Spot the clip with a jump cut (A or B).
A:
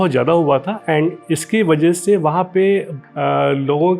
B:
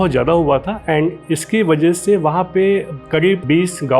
A